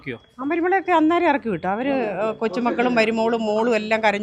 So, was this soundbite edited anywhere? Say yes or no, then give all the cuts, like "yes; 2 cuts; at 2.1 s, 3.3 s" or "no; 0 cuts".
no; 0 cuts